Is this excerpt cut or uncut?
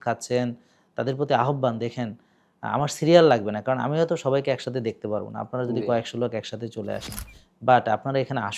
uncut